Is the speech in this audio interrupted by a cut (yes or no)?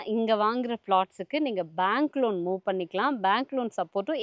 no